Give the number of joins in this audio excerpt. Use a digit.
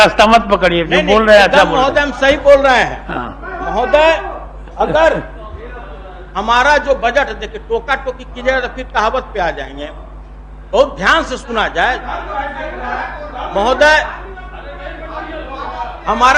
0